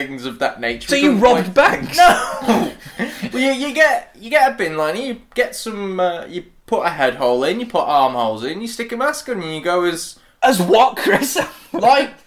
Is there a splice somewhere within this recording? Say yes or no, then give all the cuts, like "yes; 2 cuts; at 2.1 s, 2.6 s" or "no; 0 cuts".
no; 0 cuts